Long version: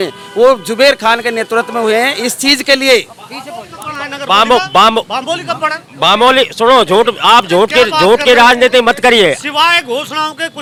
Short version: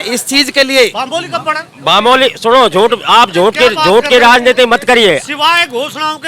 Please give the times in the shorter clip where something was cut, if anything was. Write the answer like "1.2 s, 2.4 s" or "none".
1.0 s